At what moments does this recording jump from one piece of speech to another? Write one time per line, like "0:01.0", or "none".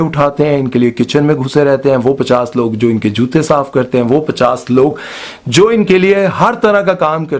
none